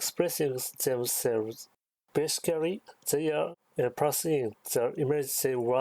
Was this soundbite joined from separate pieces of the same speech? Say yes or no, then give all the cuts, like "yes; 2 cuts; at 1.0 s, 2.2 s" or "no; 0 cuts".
yes; 1 cut; at 1.9 s